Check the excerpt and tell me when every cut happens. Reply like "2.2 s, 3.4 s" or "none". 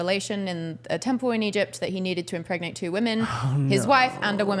none